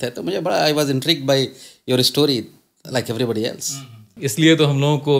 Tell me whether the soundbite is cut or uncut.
cut